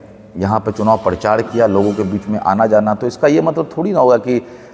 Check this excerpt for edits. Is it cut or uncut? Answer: uncut